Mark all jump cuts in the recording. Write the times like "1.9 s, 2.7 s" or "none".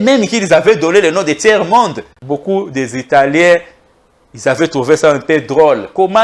2.1 s